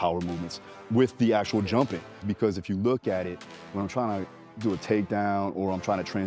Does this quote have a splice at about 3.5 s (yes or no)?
yes